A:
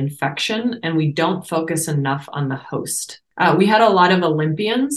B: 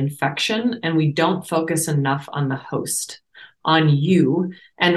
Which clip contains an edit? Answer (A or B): A